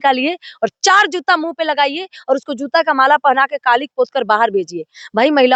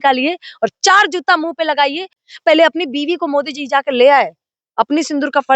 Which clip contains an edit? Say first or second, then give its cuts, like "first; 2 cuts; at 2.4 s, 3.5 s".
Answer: second; 1 cut; at 2.1 s